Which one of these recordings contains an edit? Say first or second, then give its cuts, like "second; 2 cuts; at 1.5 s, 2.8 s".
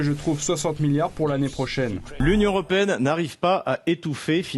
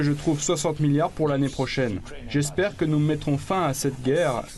first; 1 cut; at 2.0 s